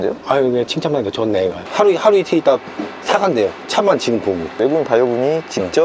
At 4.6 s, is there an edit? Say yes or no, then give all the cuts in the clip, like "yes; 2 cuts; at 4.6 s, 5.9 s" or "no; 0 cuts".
yes; 2 cuts; at 1.6 s, 4.6 s